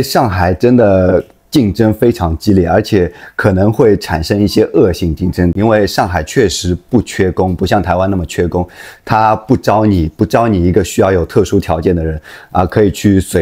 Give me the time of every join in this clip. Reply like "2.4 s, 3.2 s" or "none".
5.5 s